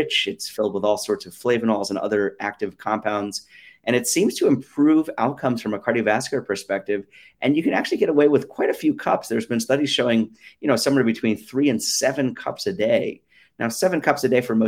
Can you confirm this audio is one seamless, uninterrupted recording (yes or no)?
yes